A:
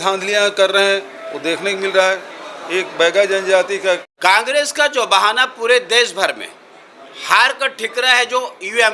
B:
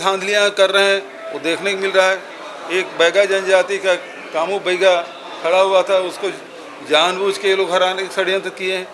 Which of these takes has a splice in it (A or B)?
A